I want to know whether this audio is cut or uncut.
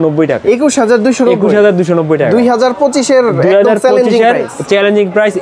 uncut